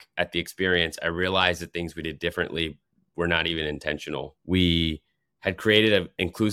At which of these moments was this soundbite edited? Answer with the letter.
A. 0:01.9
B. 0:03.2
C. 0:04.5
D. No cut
D